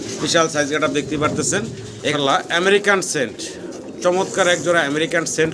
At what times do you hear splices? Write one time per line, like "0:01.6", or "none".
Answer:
0:02.1